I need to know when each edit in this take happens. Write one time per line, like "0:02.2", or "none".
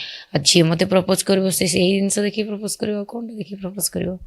0:02.5

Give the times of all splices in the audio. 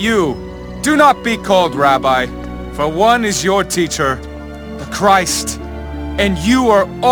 none

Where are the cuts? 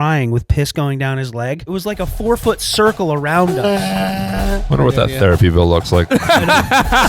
0:01.7
0:04.6

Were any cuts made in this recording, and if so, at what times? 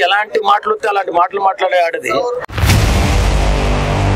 0:02.4

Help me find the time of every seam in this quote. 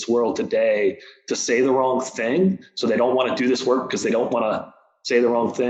none

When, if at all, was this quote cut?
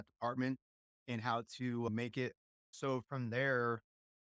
0:02.7

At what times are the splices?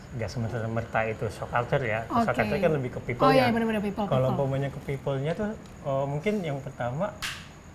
none

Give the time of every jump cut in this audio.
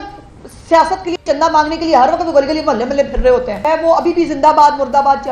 0:03.6

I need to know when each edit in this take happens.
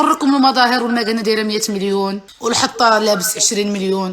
0:02.3

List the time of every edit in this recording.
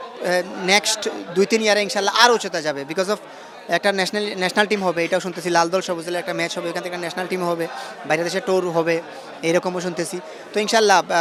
none

